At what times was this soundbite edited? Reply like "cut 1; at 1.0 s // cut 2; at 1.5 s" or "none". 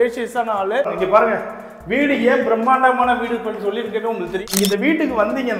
cut 1; at 0.9 s // cut 2; at 4.5 s